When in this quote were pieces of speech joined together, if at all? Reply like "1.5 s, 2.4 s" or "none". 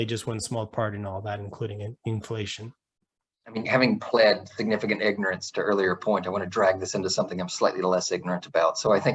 none